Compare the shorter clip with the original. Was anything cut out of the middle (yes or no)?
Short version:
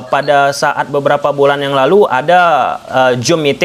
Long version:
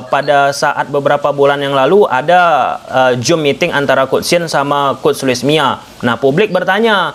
no